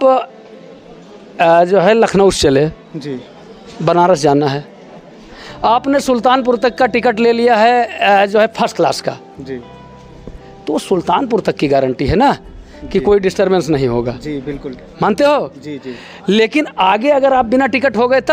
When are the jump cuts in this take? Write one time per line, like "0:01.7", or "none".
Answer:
none